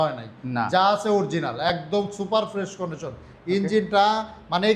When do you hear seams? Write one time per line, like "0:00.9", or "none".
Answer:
none